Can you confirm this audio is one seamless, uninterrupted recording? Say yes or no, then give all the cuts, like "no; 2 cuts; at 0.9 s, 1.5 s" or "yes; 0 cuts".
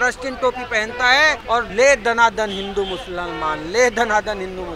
no; 1 cut; at 1.5 s